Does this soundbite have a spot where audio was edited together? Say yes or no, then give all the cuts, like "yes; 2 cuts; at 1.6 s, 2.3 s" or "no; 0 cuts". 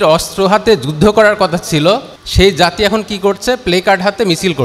yes; 1 cut; at 2.2 s